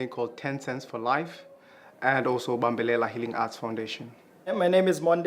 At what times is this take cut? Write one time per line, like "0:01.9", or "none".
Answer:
0:02.5

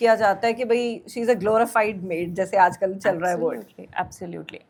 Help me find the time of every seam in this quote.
none

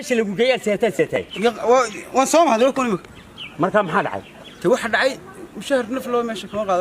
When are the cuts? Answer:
0:01.1

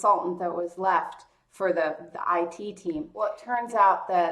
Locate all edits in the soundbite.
0:03.4

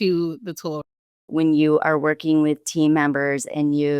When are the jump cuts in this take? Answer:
0:01.1

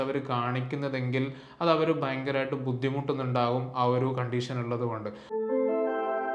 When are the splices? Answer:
0:05.2

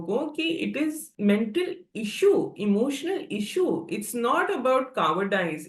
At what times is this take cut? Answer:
0:01.1

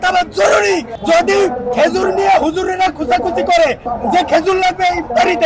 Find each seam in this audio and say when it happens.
0:00.9
0:03.8

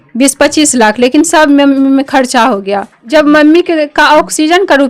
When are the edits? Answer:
0:03.0

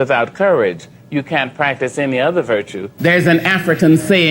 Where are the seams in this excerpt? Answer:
0:02.8

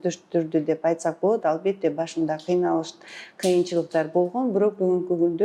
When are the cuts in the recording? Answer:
none

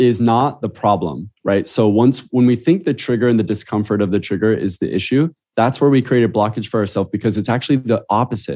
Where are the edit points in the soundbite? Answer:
none

